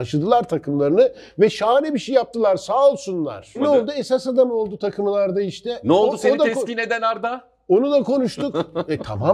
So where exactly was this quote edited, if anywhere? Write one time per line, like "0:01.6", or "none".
0:03.6